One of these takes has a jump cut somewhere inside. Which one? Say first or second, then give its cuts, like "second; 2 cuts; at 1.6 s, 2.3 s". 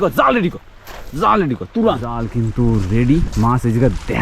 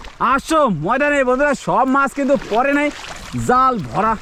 first; 1 cut; at 2.3 s